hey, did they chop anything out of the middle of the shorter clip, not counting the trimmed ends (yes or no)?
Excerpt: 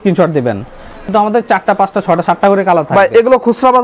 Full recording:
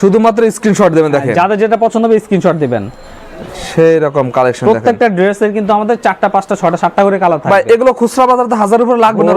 yes